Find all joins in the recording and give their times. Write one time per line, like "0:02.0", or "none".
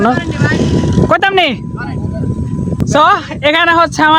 0:02.8